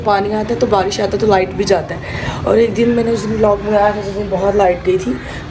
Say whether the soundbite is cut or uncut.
uncut